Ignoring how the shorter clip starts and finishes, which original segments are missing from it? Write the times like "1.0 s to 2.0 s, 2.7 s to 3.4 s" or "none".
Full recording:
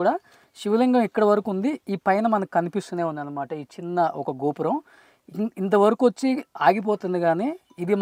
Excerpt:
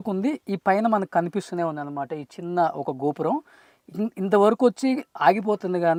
none